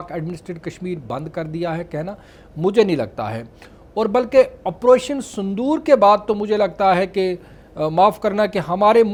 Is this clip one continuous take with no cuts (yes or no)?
yes